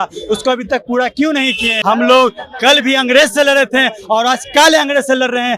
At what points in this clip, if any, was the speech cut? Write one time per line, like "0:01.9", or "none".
0:01.7